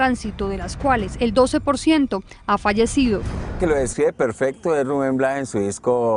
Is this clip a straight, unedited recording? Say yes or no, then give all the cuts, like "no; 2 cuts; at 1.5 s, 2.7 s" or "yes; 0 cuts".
no; 1 cut; at 2.3 s